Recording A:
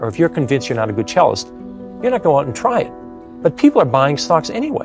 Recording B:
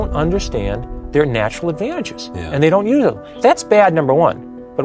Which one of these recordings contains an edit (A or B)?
B